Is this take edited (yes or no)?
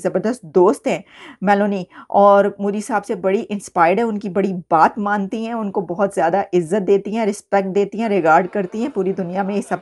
no